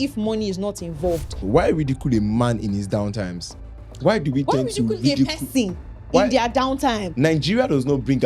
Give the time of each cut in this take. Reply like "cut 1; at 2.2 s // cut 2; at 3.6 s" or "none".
cut 1; at 1.4 s // cut 2; at 7.1 s